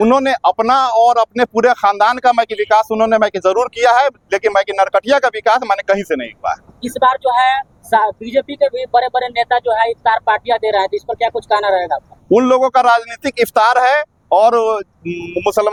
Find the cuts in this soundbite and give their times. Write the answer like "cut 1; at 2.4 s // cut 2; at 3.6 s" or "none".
none